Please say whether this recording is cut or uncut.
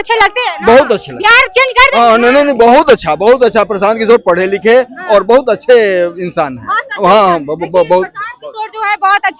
uncut